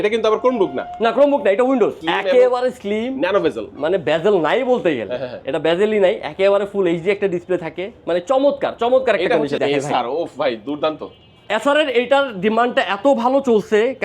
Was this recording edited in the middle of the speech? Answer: yes; 2 cuts; at 2.0 s, 9.6 s

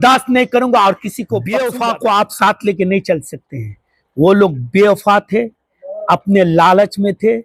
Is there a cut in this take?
yes; 1 cut; at 1.5 s

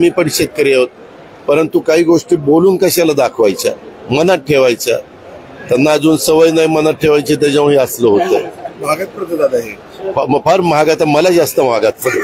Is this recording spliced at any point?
no; 0 cuts

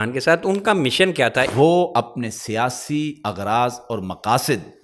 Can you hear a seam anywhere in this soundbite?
yes; 1 cut; at 1.5 s

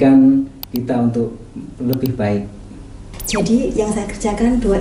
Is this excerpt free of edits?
no; 1 cut; at 3.1 s

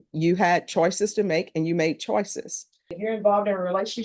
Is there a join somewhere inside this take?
yes; 1 cut; at 3.0 s

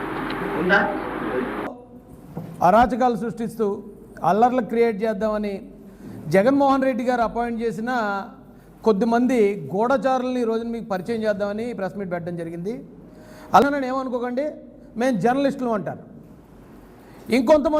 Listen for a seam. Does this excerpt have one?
yes; 2 cuts; at 1.8 s, 13.6 s

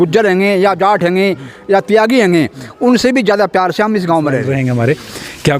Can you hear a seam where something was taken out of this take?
yes; 1 cut; at 4.5 s

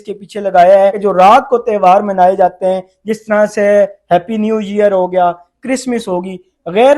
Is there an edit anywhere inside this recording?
yes; 1 cut; at 1.0 s

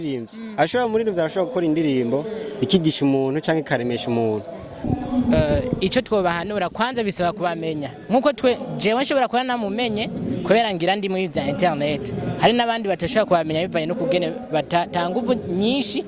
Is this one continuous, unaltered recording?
no; 1 cut; at 4.9 s

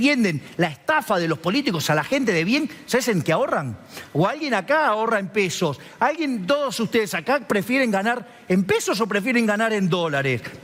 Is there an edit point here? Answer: no; 0 cuts

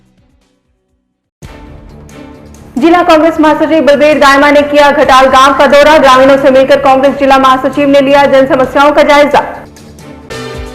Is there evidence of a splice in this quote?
yes; 2 cuts; at 1.2 s, 2.6 s

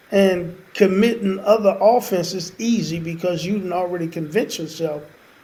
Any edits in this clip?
no; 0 cuts

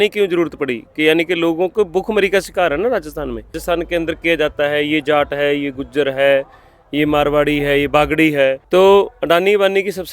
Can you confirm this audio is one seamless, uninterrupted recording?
no; 2 cuts; at 3.6 s, 8.6 s

